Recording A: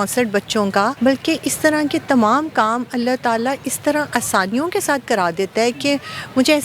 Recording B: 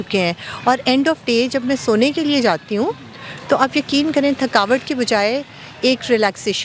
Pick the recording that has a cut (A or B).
A